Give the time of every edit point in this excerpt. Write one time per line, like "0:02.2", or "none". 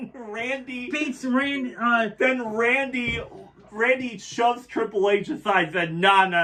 none